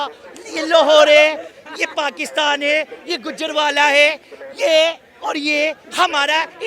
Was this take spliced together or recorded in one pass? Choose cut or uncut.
uncut